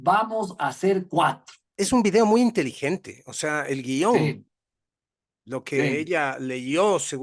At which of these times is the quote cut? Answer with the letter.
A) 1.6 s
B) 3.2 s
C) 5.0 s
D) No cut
A